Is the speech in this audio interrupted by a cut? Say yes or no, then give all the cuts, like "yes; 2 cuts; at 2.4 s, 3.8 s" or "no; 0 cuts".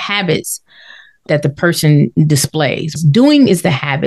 yes; 1 cut; at 2.9 s